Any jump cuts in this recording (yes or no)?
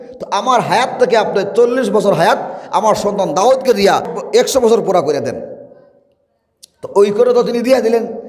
yes